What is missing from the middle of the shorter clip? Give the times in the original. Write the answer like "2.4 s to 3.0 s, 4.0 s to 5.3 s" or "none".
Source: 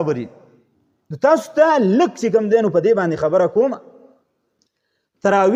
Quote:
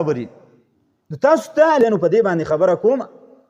1.8 s to 2.5 s